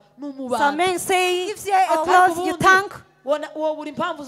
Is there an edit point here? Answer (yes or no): yes